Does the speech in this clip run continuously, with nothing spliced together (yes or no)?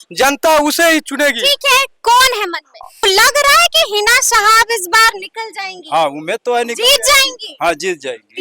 no